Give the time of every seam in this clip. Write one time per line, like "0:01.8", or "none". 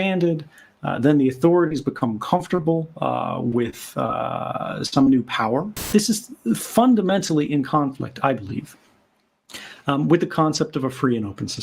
0:05.9